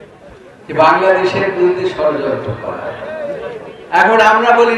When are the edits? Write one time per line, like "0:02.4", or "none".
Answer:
0:03.7